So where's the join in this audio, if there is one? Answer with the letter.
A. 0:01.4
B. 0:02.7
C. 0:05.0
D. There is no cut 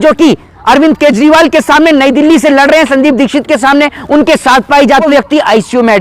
C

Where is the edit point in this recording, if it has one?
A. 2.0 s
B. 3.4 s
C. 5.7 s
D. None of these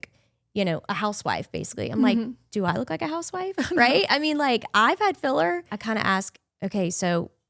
C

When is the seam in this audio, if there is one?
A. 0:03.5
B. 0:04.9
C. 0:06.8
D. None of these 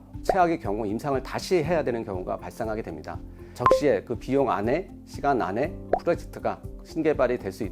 A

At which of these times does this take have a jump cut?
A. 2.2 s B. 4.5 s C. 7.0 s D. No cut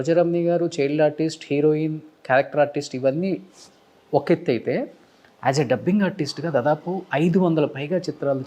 D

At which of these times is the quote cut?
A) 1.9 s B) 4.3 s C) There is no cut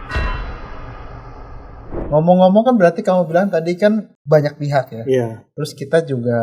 A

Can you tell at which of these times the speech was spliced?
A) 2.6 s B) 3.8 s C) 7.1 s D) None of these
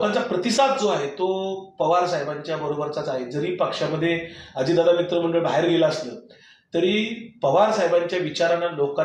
D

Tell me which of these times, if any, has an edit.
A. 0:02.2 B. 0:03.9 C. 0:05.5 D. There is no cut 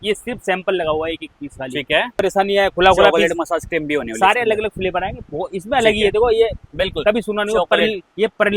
A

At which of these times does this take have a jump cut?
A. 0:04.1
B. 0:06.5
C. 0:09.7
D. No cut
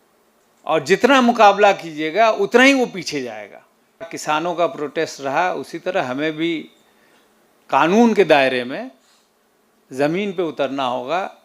A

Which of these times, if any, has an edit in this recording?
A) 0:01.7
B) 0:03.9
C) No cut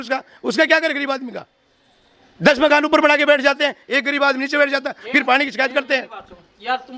C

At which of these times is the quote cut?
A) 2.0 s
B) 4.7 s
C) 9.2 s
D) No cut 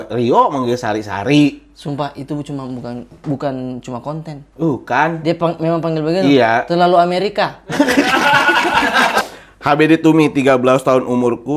C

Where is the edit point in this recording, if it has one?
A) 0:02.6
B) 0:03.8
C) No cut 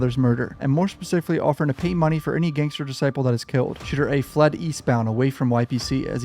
B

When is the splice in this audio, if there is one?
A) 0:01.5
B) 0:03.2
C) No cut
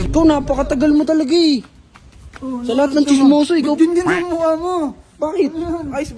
C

